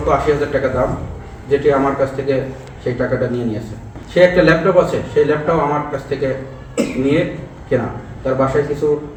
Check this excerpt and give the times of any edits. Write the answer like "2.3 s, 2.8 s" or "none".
none